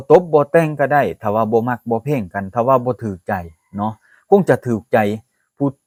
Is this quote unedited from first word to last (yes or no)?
yes